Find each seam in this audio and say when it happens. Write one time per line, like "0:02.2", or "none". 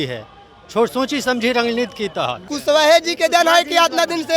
0:02.4

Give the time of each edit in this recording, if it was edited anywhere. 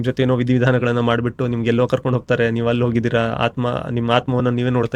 none

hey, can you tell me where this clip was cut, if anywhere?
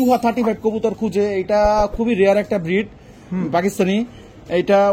none

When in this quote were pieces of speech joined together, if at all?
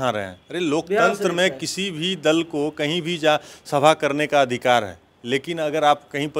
none

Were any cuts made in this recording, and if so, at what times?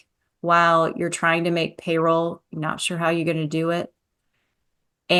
none

